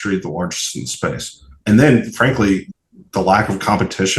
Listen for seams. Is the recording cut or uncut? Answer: cut